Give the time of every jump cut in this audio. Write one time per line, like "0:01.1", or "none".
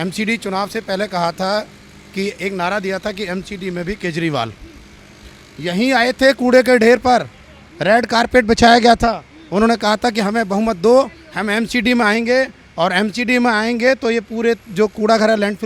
none